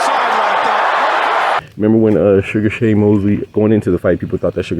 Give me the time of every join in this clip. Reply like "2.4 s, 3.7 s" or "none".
1.6 s